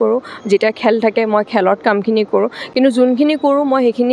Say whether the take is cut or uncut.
uncut